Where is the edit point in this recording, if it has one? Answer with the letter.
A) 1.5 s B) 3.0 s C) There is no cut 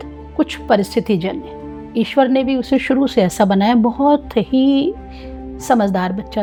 C